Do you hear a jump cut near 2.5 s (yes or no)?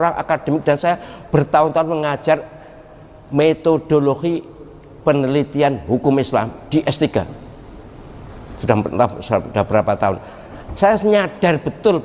no